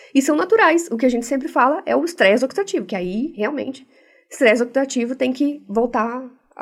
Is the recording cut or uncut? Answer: uncut